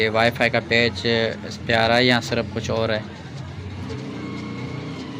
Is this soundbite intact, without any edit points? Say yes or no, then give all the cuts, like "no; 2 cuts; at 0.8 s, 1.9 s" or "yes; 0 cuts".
yes; 0 cuts